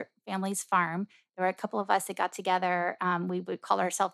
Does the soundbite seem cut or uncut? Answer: uncut